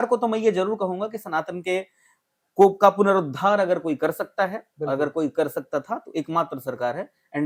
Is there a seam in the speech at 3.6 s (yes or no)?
no